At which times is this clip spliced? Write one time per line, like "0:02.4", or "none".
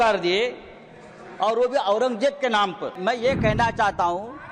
0:02.9